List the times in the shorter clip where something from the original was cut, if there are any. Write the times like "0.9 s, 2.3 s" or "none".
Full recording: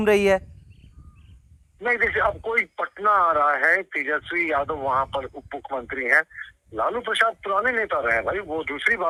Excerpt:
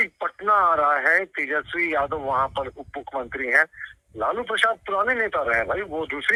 none